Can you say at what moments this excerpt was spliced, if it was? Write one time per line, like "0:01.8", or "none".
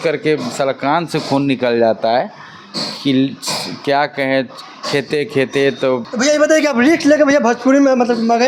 none